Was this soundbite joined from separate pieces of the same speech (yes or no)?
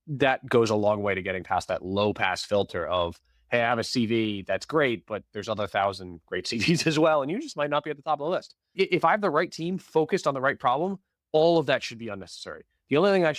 yes